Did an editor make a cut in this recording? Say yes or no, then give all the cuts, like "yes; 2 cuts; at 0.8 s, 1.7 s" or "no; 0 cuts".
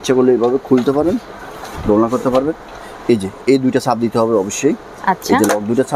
no; 0 cuts